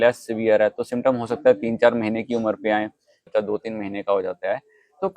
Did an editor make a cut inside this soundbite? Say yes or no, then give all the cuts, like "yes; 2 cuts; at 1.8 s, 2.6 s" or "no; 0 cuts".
yes; 1 cut; at 3.2 s